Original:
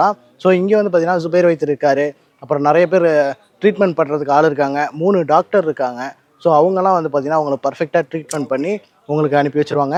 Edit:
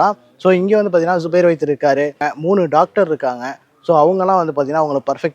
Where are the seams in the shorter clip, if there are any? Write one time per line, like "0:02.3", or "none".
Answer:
0:02.3